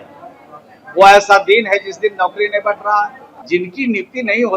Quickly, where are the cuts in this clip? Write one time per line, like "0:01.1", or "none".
0:03.3